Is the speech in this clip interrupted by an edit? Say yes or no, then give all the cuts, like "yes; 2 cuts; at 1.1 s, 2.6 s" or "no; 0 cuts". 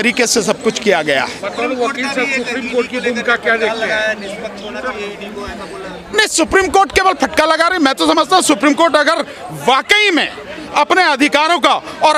no; 0 cuts